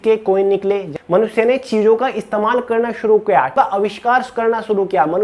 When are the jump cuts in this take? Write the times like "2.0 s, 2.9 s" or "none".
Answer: 0.9 s, 3.5 s